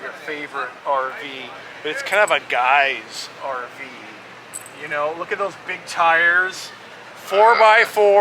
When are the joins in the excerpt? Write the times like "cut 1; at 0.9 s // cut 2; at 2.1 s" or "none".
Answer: none